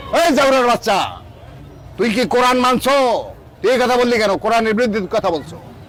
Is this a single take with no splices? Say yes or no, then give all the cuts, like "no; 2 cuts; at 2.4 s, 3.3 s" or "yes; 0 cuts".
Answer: yes; 0 cuts